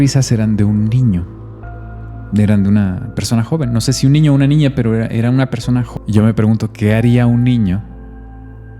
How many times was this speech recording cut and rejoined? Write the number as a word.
one